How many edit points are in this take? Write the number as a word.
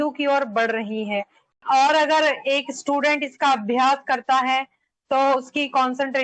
one